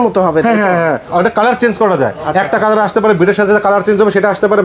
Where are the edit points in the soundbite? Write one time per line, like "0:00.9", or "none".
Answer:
0:01.0